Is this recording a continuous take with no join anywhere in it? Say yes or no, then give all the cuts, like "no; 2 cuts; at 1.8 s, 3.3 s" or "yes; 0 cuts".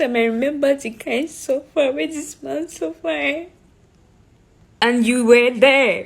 no; 1 cut; at 4.8 s